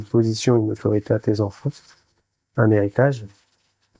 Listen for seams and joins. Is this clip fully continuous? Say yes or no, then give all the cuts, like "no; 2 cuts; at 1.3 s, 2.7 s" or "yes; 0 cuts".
yes; 0 cuts